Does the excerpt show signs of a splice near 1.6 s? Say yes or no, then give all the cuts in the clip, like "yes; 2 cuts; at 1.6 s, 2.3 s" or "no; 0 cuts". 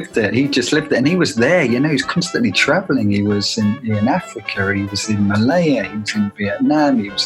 no; 0 cuts